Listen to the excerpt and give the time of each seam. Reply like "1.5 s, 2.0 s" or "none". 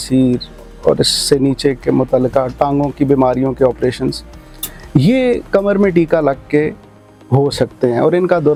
none